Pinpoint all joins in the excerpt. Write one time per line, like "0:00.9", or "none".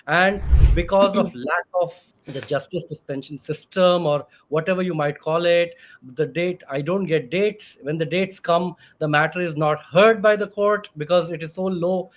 0:02.0